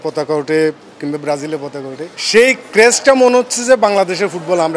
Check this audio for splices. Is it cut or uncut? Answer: cut